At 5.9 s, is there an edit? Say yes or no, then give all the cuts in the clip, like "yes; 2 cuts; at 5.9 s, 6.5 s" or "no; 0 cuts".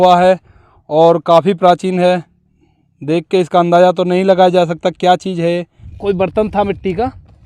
yes; 1 cut; at 5.9 s